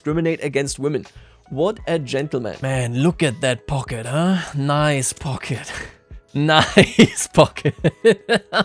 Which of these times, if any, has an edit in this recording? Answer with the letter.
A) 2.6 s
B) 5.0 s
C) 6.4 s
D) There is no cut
A